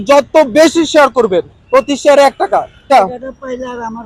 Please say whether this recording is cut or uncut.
uncut